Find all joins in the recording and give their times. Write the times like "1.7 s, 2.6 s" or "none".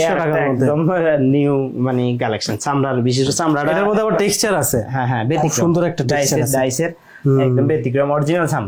none